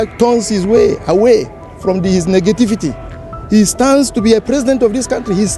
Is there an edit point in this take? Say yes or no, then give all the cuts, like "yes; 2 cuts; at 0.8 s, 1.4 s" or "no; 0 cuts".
no; 0 cuts